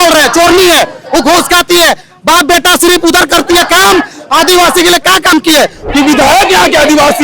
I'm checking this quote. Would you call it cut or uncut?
cut